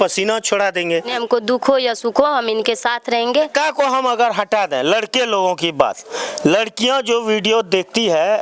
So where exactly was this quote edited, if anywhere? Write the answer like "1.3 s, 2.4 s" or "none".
1.1 s, 3.5 s